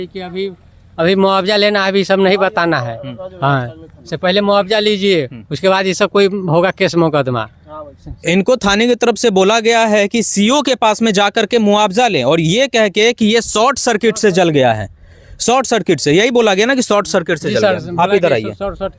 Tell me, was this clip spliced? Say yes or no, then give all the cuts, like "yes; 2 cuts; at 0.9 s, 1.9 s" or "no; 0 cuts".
no; 0 cuts